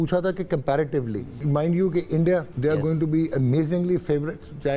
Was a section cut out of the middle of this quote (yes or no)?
yes